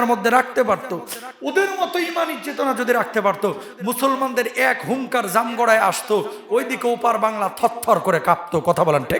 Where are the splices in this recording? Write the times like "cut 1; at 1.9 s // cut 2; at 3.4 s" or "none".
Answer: none